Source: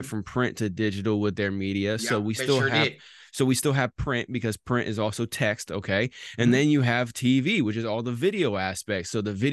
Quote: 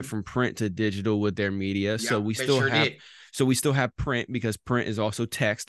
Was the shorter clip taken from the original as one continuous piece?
yes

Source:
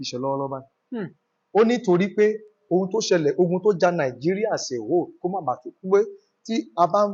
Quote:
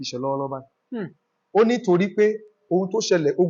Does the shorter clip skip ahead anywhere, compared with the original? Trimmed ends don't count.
no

